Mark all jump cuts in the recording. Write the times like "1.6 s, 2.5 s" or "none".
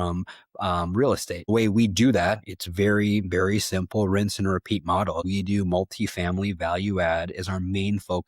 1.5 s, 5.2 s